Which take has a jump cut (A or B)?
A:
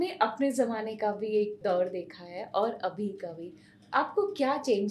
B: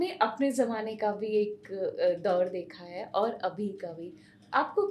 A